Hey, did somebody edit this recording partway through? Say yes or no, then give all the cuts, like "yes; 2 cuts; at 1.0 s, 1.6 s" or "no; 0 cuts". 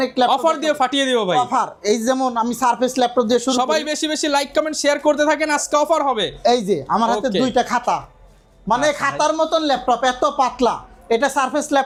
no; 0 cuts